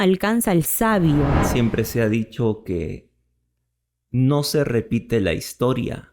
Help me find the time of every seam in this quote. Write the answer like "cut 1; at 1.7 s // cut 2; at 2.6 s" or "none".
cut 1; at 1.4 s